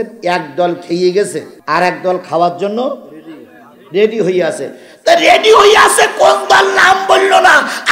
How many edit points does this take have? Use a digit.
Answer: 1